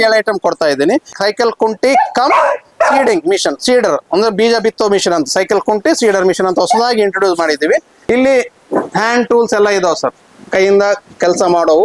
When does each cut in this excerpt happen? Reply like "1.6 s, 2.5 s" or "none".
1.1 s, 7.9 s